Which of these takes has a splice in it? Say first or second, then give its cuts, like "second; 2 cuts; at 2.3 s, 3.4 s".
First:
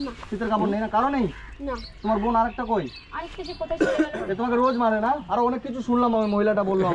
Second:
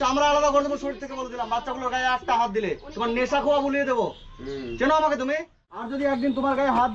second; 1 cut; at 5.9 s